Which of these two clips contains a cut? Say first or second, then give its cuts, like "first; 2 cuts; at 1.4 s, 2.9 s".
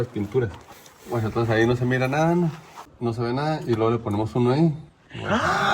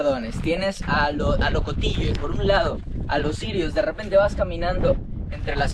first; 2 cuts; at 1.0 s, 2.8 s